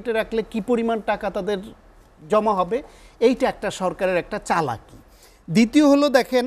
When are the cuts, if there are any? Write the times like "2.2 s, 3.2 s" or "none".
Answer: none